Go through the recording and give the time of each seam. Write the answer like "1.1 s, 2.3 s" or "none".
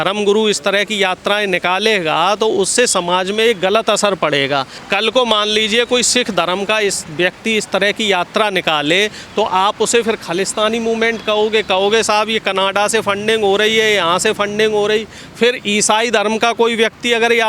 4.8 s